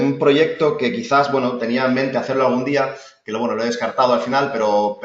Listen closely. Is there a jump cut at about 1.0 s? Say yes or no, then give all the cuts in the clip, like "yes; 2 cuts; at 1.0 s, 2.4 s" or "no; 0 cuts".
no; 1 cut; at 4.0 s